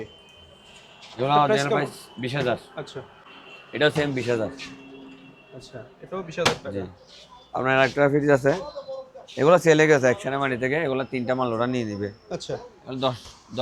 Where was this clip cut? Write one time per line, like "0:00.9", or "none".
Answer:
none